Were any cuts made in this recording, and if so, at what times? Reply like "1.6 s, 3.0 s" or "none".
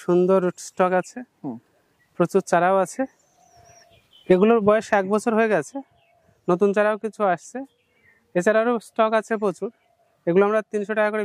none